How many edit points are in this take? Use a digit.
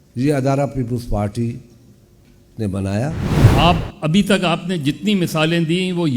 1